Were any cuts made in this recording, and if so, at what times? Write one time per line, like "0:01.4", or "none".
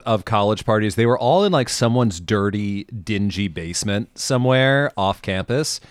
none